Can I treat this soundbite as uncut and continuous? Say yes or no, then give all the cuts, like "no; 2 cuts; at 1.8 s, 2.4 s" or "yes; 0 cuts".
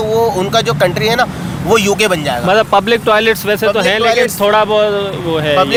yes; 0 cuts